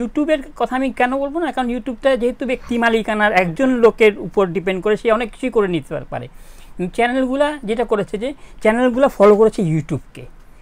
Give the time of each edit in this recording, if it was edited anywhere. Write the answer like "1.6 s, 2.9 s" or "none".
none